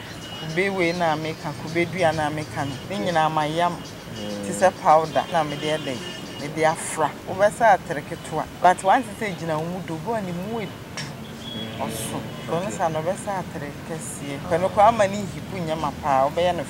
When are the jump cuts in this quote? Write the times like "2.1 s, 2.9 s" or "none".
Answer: 2.8 s, 5.3 s, 7.2 s, 8.4 s, 11.3 s, 12.4 s, 14.5 s